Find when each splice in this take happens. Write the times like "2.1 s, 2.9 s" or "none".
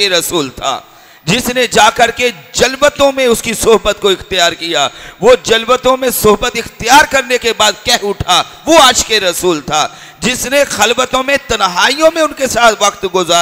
none